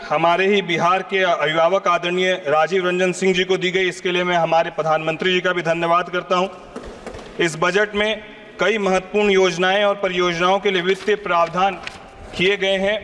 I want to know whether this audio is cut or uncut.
uncut